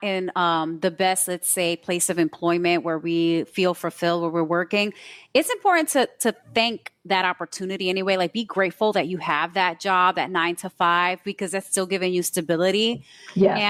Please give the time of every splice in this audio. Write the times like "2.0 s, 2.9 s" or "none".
none